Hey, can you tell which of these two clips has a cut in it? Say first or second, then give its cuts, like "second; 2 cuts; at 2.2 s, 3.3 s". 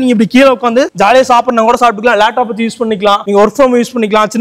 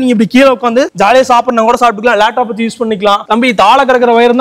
second; 1 cut; at 3.2 s